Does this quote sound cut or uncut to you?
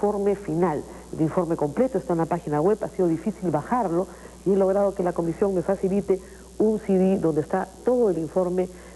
uncut